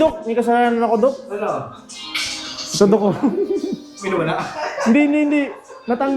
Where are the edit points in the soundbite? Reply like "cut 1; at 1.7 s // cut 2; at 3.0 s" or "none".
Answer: none